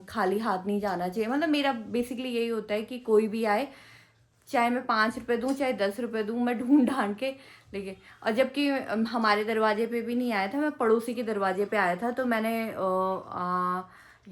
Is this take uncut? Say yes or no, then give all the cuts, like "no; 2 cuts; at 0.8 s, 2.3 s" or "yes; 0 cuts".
yes; 0 cuts